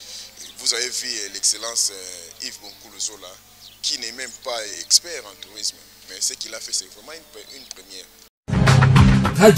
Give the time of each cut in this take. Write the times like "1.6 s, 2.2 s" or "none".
8.2 s